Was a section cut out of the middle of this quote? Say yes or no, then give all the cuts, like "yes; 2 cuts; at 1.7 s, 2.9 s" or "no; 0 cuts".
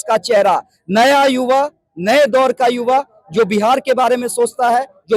no; 0 cuts